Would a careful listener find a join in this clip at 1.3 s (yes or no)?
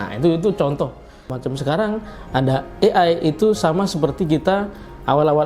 yes